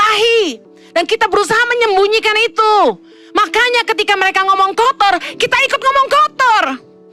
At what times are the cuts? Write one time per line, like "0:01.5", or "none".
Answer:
none